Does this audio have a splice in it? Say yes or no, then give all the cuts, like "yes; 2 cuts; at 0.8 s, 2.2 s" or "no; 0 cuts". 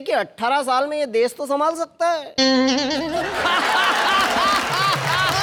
no; 0 cuts